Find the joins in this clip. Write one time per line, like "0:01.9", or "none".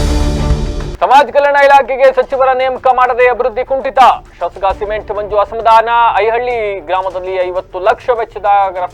none